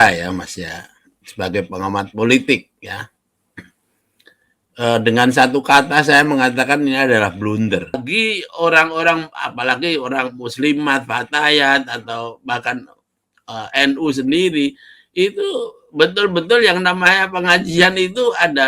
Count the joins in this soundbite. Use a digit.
1